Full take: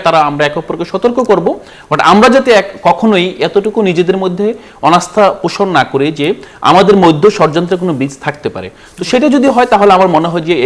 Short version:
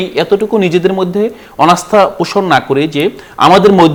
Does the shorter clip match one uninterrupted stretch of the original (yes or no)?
yes